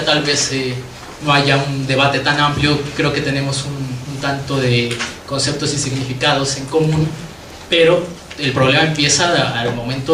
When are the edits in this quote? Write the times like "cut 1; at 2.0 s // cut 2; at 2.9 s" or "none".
cut 1; at 7.5 s